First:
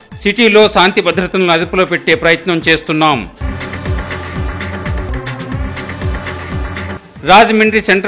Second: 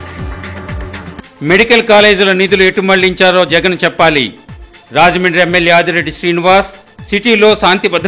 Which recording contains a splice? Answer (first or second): second